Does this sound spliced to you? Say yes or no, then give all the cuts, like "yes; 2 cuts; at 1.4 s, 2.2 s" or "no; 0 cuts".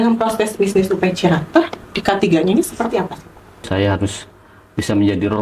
yes; 1 cut; at 3.7 s